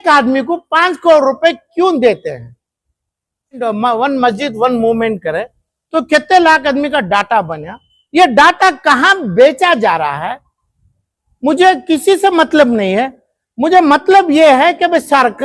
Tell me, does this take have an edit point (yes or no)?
yes